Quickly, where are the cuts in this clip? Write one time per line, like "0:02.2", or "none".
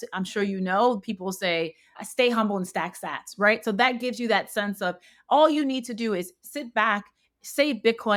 none